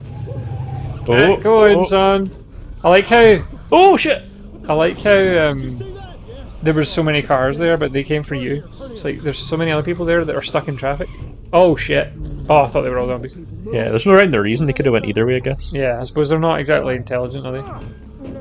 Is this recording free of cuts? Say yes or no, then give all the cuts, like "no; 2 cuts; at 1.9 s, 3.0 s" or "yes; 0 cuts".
no; 1 cut; at 1.1 s